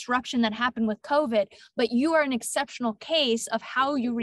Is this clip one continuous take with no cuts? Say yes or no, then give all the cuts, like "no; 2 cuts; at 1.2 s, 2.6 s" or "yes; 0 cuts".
yes; 0 cuts